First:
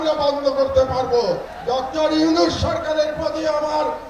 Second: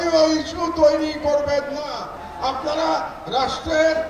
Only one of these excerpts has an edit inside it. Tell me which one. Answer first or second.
second